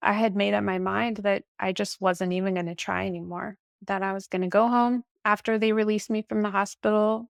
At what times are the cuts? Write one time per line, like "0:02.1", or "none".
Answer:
none